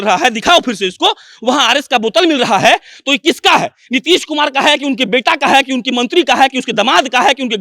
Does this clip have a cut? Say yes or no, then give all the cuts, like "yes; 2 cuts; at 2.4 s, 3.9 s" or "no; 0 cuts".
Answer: no; 0 cuts